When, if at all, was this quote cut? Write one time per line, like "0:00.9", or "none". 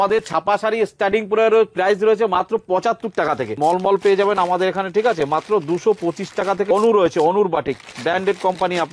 0:03.5
0:06.7